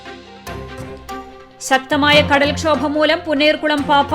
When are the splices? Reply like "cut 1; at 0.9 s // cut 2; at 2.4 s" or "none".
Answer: cut 1; at 1.2 s